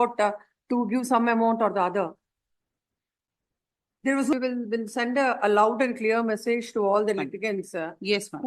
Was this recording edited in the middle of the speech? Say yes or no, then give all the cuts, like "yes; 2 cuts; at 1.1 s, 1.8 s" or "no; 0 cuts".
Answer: yes; 1 cut; at 4.3 s